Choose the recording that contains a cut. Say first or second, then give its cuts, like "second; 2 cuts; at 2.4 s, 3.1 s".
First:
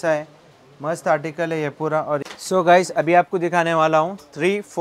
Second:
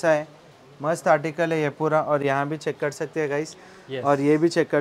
first; 1 cut; at 2.2 s